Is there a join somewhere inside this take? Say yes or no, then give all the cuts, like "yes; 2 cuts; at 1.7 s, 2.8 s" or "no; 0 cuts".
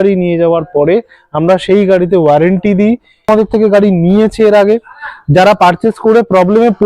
yes; 1 cut; at 3.3 s